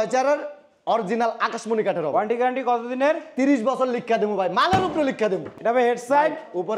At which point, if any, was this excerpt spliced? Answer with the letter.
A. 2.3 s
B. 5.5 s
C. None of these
B